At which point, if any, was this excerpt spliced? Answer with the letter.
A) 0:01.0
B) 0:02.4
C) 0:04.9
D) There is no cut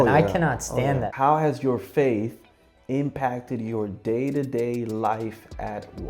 A